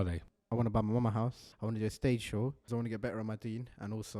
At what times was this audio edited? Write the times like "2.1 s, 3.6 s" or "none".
1.4 s, 2.7 s